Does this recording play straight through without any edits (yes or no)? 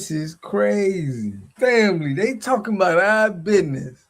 no